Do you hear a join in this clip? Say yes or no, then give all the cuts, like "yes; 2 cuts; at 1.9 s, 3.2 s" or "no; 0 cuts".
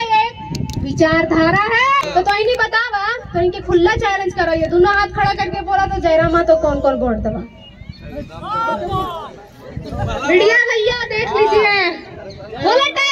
yes; 1 cut; at 2.1 s